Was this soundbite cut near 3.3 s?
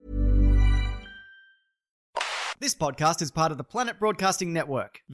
no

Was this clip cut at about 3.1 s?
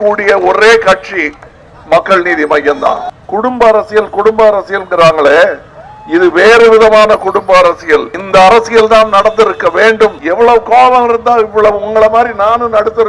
yes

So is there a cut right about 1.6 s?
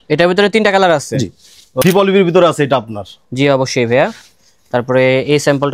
yes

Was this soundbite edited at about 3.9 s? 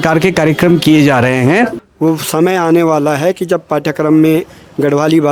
no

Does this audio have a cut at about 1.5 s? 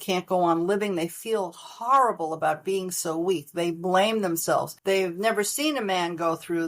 no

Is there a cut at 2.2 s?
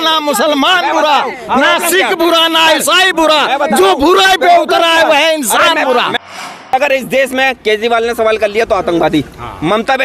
no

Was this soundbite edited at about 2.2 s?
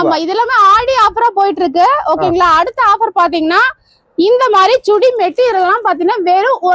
no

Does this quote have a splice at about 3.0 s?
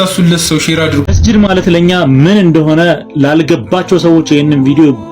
no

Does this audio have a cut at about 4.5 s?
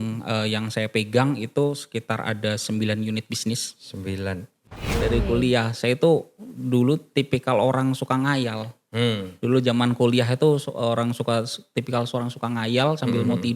yes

